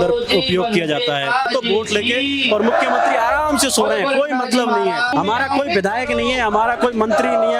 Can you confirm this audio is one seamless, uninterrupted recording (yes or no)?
no